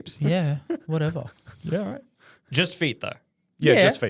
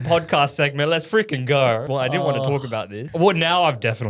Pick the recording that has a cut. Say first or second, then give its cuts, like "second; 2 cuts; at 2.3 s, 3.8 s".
second; 2 cuts; at 1.8 s, 3.0 s